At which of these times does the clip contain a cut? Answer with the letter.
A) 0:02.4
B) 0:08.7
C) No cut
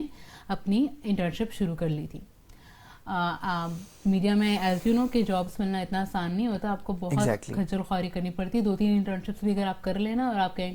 C